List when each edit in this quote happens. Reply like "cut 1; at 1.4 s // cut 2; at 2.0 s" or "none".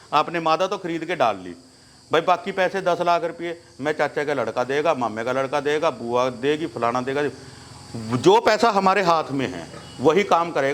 none